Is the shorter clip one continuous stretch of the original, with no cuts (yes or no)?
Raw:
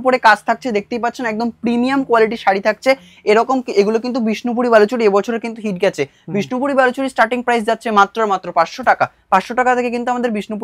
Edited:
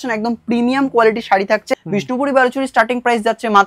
no